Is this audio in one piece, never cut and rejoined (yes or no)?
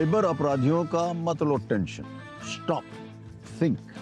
yes